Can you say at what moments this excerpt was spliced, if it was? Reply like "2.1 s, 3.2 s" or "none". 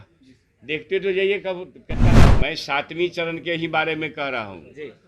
2.2 s